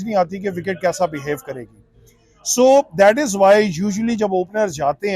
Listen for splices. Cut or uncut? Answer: uncut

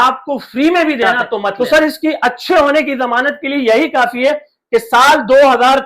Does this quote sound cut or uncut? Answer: cut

